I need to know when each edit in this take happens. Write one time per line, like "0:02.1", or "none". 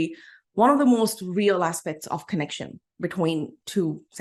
none